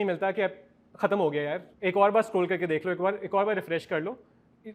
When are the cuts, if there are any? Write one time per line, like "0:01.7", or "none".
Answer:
0:01.7